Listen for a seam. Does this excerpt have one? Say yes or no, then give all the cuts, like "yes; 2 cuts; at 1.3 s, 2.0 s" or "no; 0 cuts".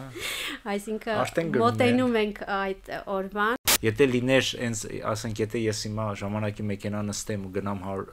yes; 1 cut; at 3.6 s